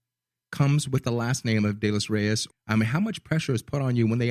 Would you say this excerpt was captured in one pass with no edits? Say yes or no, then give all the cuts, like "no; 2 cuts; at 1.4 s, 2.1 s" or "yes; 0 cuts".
no; 1 cut; at 2.5 s